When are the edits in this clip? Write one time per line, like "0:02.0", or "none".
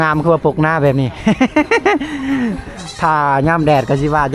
none